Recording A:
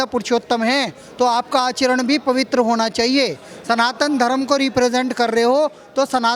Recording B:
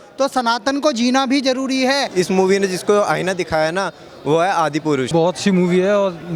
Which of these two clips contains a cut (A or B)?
B